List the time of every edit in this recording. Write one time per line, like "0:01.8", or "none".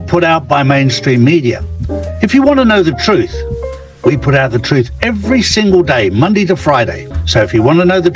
0:07.1